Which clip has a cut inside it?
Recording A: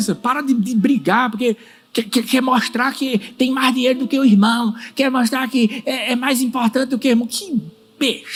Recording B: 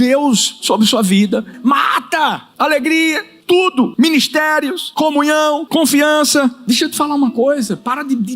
B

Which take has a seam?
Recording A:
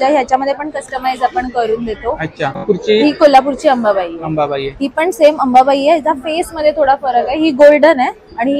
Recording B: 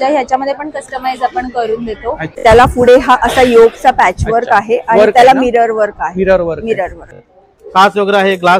B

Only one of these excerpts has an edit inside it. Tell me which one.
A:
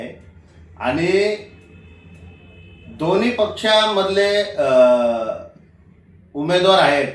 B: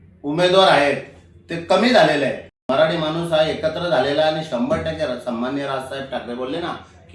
B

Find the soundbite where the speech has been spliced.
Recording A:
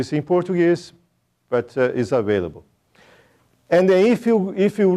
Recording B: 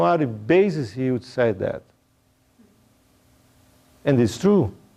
A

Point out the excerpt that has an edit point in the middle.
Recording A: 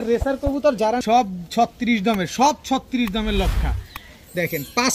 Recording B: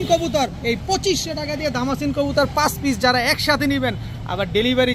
A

